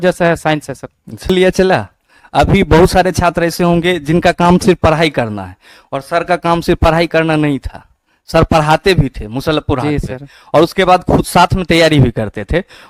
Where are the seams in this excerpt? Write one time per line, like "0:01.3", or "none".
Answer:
none